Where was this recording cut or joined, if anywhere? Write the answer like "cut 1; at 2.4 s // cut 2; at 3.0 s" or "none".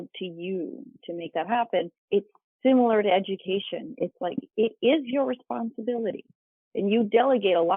cut 1; at 2.0 s